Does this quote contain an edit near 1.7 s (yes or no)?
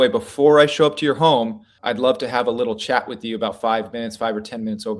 yes